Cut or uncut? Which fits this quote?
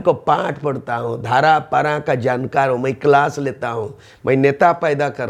uncut